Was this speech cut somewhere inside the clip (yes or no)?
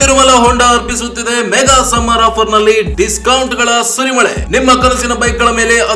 no